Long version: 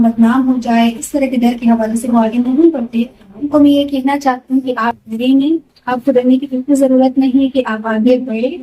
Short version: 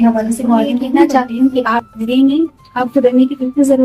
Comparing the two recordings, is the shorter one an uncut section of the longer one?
no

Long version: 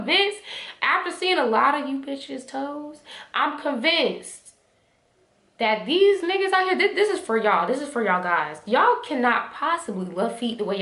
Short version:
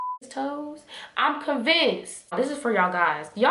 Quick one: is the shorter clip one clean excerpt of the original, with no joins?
no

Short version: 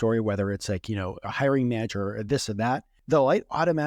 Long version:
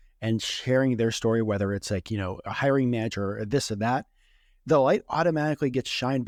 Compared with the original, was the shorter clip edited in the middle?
yes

